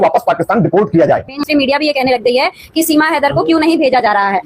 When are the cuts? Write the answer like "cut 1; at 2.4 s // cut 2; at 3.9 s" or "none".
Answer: none